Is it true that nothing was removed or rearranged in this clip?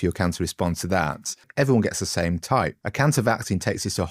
no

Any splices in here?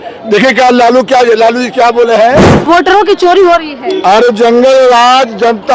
yes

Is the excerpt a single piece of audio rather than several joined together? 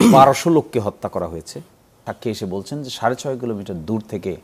no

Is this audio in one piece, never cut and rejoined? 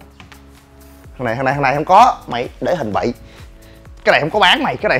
yes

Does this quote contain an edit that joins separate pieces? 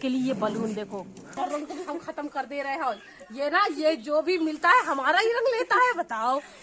no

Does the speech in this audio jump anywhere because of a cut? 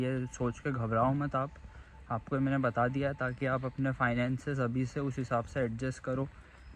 no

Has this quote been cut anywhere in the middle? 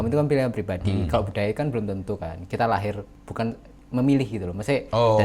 yes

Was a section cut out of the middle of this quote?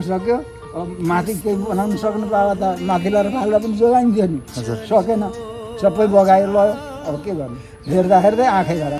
no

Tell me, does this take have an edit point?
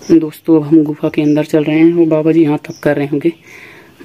no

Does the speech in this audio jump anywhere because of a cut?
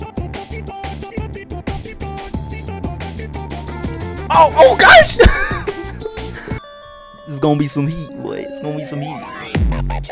yes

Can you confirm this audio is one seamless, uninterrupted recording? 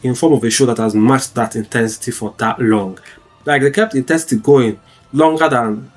yes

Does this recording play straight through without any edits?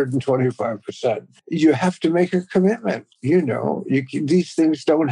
no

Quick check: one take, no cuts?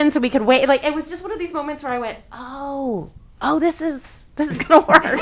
yes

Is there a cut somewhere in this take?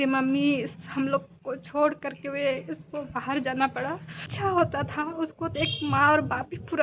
yes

